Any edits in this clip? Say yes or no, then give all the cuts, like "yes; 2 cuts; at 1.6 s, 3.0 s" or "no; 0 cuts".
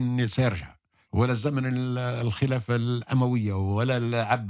no; 0 cuts